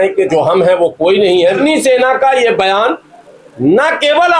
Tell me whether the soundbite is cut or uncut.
cut